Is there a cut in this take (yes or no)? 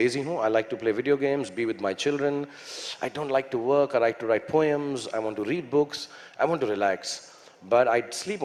no